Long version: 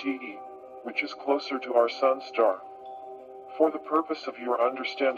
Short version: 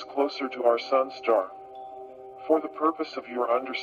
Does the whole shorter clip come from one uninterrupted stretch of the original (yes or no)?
yes